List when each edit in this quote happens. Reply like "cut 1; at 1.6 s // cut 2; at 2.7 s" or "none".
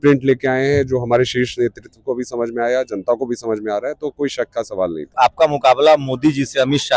cut 1; at 5.1 s